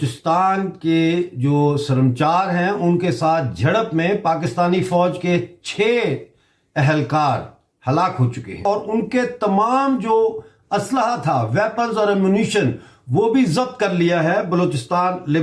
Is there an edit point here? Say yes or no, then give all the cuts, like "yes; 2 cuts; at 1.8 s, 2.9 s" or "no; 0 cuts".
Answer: no; 0 cuts